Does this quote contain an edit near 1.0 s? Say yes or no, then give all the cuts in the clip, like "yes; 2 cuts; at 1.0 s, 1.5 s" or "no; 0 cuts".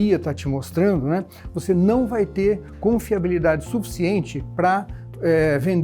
no; 0 cuts